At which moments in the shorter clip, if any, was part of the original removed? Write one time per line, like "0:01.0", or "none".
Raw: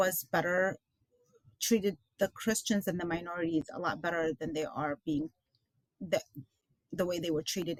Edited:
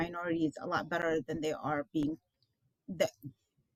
none